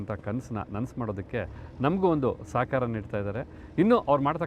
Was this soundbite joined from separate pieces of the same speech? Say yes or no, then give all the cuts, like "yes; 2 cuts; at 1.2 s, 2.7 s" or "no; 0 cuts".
no; 0 cuts